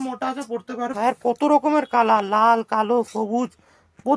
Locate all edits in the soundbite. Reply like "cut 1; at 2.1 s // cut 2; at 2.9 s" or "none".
cut 1; at 0.9 s